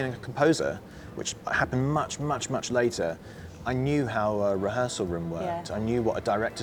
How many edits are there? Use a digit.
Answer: 0